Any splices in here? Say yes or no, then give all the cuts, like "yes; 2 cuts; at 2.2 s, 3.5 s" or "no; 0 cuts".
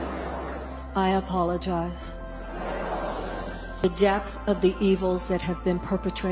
yes; 1 cut; at 3.8 s